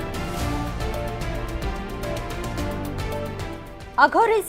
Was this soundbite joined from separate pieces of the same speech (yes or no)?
yes